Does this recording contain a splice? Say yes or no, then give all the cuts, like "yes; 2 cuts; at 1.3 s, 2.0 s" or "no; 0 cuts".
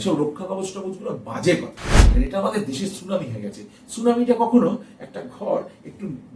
yes; 1 cut; at 2.0 s